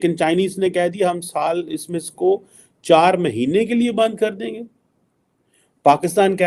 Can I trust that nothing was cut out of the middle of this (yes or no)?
yes